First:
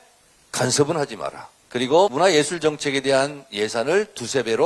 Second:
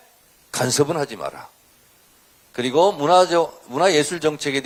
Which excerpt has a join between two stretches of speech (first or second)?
first